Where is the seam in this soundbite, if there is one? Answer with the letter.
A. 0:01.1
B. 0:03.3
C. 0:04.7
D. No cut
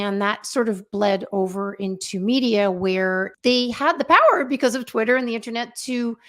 B